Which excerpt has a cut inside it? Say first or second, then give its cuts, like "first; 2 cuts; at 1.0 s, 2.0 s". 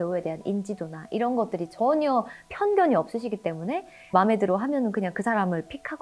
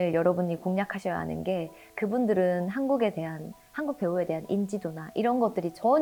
first; 1 cut; at 4.1 s